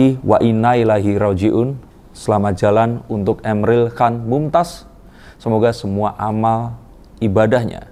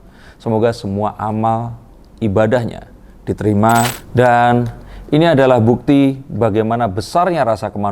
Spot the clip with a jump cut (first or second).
second